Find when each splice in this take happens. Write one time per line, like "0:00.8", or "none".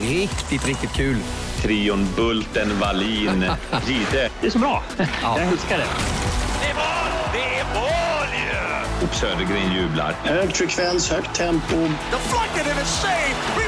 none